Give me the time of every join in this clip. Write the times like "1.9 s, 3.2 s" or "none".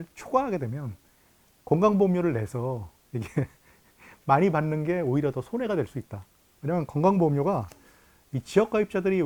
none